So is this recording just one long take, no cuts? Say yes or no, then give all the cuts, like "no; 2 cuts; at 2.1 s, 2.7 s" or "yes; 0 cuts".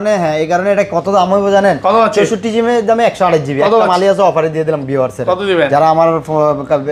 yes; 0 cuts